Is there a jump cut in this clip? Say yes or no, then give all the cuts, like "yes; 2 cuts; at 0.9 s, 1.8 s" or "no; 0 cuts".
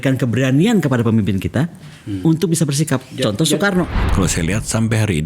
yes; 1 cut; at 4.0 s